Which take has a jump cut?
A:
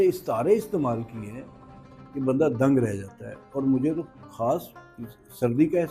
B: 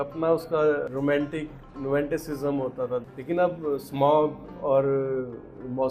B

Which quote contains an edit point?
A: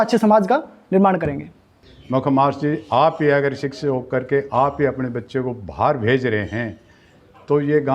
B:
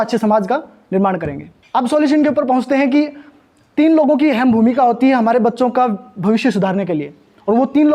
A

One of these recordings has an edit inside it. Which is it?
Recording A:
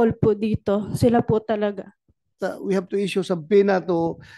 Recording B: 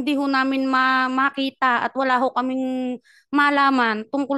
A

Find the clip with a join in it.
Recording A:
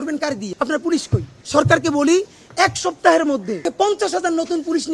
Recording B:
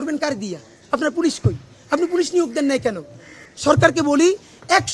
A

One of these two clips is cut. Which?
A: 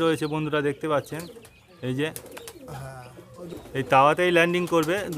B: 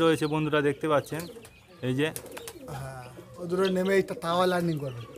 A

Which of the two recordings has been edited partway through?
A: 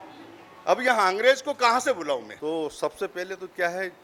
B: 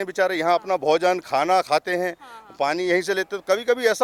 A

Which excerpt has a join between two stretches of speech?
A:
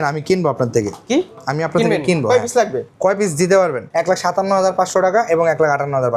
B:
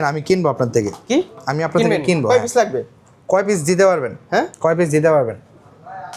A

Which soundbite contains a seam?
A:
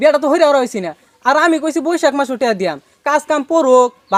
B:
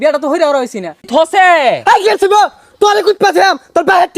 B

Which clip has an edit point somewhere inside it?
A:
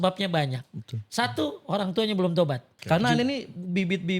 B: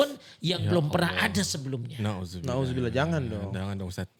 A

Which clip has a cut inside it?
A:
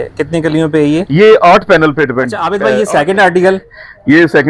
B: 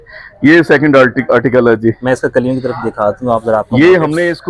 A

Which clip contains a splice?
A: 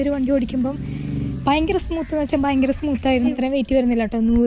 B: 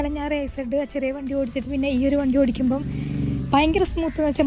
A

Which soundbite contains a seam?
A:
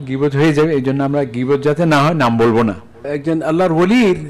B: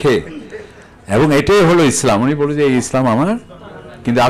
A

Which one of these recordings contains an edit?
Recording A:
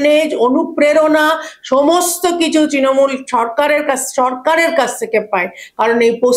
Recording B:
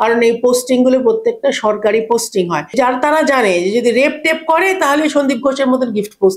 B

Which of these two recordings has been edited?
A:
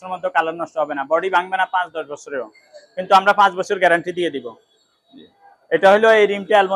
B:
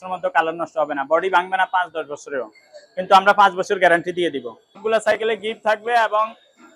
B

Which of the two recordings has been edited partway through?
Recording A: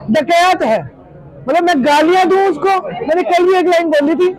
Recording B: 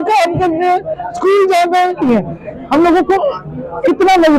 B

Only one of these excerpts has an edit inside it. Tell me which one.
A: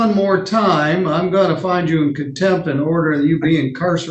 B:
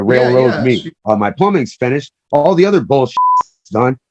B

